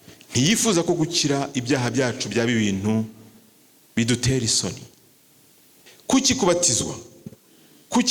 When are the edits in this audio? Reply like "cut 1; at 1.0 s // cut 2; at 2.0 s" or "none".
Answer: cut 1; at 5.9 s